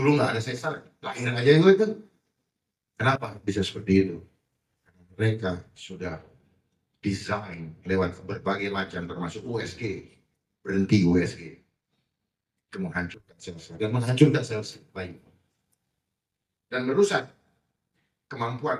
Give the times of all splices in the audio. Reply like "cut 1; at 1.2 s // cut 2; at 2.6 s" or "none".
none